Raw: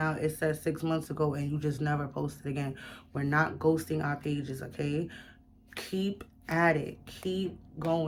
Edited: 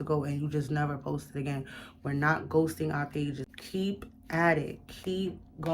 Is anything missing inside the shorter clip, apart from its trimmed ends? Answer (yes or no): yes